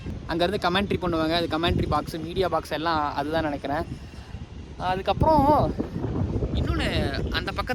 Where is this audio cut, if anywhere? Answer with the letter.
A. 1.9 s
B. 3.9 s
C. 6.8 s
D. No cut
D